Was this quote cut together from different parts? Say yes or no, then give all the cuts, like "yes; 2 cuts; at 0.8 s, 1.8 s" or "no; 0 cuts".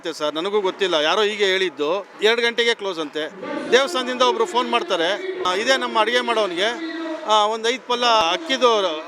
yes; 3 cuts; at 2.1 s, 5.4 s, 8.2 s